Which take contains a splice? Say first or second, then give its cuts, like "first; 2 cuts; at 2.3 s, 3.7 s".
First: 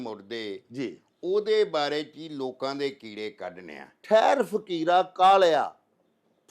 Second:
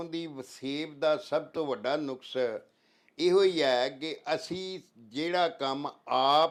first; 1 cut; at 4.0 s